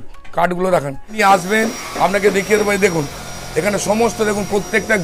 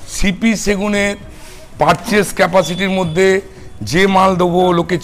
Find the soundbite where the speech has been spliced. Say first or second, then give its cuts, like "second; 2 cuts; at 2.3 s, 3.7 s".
first; 1 cut; at 1.2 s